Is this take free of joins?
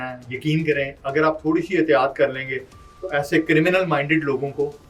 yes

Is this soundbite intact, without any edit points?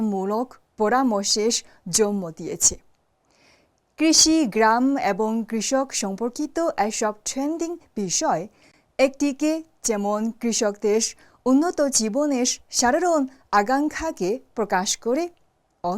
yes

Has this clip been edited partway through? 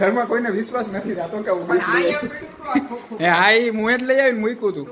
no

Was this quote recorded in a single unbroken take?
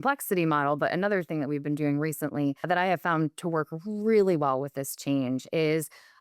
no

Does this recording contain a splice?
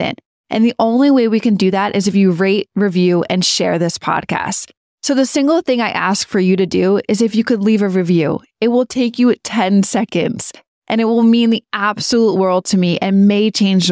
no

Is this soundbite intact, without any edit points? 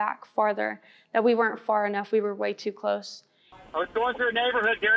yes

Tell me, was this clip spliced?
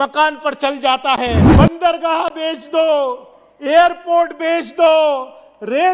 yes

